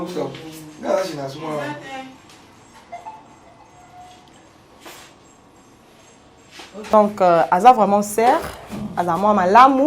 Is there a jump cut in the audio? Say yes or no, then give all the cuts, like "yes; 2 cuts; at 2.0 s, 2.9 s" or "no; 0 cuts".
yes; 1 cut; at 6.9 s